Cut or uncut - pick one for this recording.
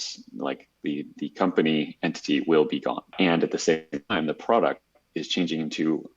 cut